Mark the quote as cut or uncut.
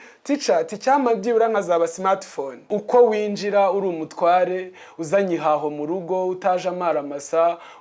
cut